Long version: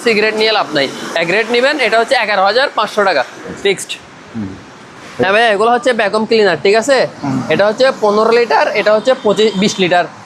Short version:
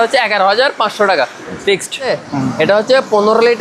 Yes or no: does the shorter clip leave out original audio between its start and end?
yes